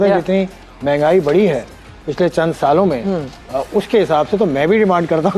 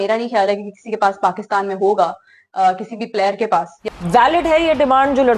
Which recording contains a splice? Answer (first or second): second